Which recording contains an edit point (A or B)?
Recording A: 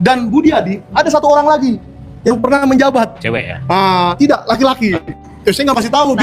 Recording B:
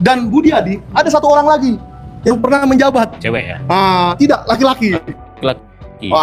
A